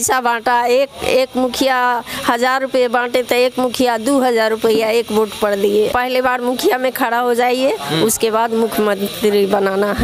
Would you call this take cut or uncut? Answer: cut